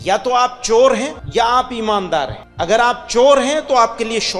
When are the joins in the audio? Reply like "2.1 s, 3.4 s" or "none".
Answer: 1.2 s, 2.4 s